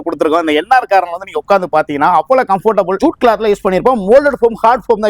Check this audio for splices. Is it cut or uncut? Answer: cut